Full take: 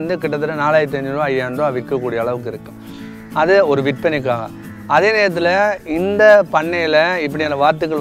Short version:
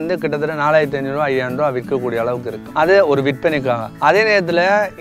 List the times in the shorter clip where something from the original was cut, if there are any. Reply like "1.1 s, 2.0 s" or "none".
2.6 s, 3.9 s